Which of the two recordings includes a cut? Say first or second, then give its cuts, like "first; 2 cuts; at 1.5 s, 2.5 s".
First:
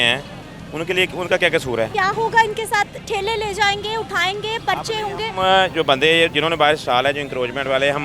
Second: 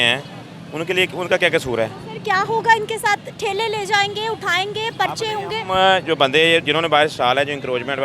first; 1 cut; at 1.9 s